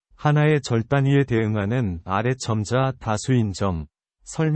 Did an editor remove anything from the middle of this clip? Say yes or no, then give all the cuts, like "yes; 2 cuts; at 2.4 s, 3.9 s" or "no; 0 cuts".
no; 0 cuts